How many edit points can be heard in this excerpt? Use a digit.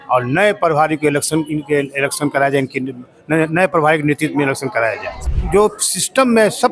1